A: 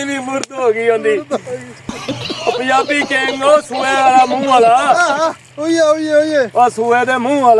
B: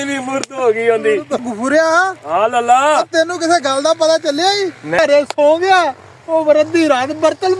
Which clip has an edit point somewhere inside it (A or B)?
B